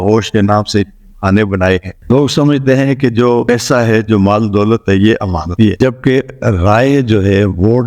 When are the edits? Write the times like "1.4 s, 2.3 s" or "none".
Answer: 1.9 s, 5.4 s

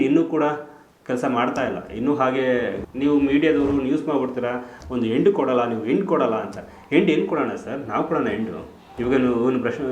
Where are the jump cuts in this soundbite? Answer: 2.8 s

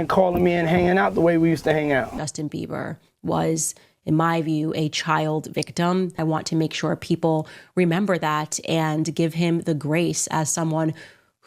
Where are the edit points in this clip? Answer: 2.2 s, 6.2 s

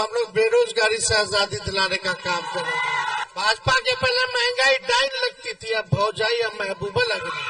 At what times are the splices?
3.2 s

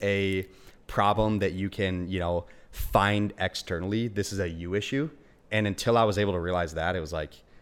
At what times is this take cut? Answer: none

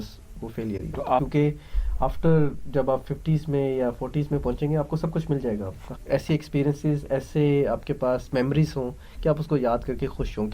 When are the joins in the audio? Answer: 1.2 s, 5.8 s

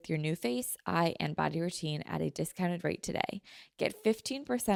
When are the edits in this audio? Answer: none

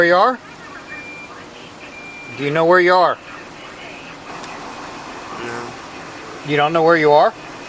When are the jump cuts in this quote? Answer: 1.8 s, 4.3 s

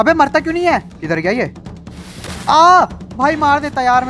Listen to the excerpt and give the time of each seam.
0.9 s

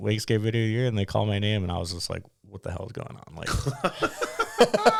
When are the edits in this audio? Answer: none

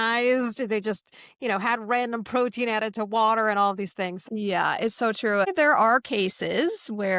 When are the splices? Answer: 4.2 s, 5.5 s

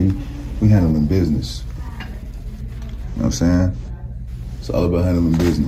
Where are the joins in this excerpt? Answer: none

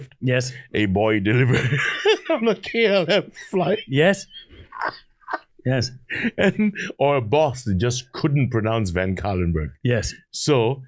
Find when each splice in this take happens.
5.5 s

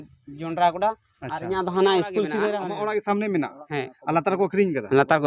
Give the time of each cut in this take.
2.6 s

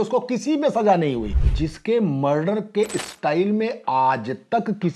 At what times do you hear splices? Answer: 1.4 s

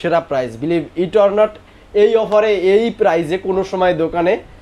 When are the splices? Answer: none

